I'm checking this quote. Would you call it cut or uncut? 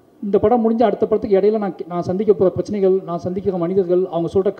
uncut